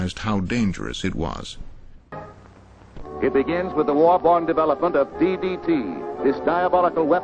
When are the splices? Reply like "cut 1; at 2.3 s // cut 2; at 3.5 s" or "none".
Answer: cut 1; at 4.9 s